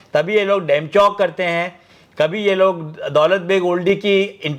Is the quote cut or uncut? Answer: uncut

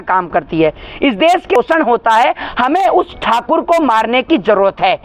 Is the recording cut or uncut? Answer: cut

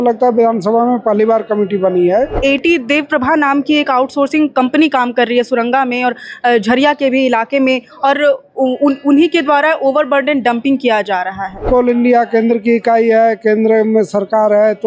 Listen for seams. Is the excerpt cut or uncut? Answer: cut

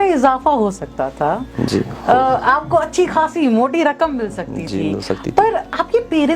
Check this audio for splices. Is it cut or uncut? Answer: uncut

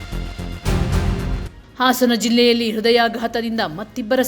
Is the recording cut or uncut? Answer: cut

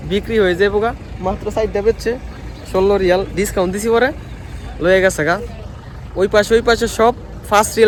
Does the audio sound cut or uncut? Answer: uncut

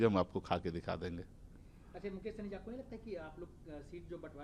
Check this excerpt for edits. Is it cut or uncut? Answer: uncut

